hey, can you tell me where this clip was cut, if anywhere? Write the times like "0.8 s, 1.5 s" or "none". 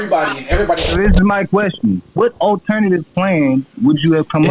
0.9 s, 2.1 s